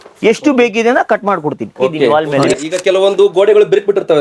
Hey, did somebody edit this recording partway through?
yes; 1 cut; at 2.1 s

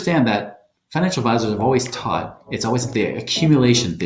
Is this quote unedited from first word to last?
yes; 0 cuts

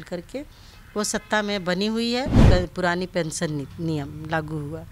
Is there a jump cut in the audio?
yes; 1 cut; at 2.4 s

